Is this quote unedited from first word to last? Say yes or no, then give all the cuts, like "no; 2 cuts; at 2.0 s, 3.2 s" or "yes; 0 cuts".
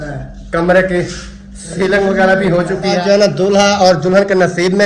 no; 1 cut; at 3.0 s